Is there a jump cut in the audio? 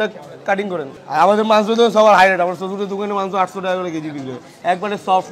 no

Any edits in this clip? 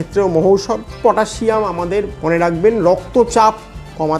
yes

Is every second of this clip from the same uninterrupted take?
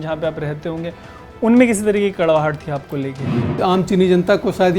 no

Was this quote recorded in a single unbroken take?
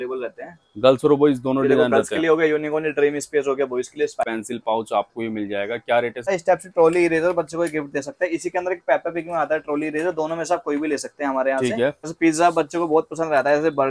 no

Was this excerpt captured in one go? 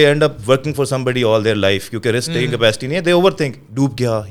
yes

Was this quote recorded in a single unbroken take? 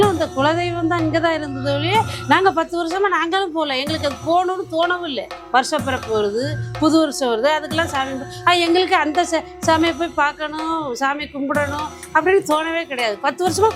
no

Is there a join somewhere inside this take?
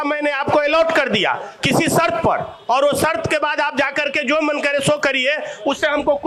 no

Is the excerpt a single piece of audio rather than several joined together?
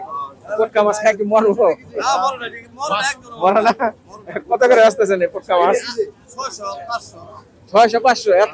yes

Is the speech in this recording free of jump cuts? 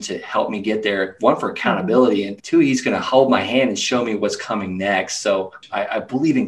no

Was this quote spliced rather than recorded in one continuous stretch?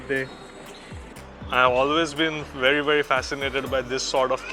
yes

